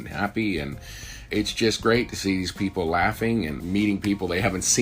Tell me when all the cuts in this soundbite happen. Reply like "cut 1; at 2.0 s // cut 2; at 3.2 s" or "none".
cut 1; at 1.3 s // cut 2; at 3.6 s